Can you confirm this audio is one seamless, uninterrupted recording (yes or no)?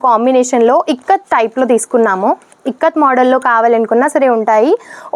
yes